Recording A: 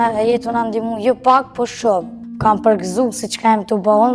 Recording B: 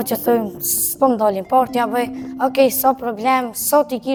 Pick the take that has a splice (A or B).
A